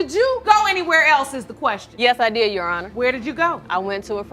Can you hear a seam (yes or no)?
yes